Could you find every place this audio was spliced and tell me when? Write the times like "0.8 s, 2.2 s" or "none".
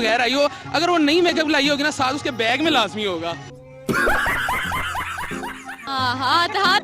5.8 s